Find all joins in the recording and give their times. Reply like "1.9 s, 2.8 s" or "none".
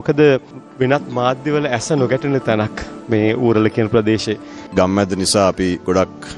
4.5 s